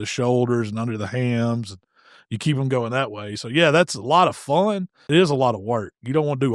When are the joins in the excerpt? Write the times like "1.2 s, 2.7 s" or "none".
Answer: 4.9 s